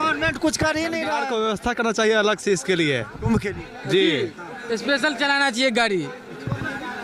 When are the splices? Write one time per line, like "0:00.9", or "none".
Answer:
0:01.1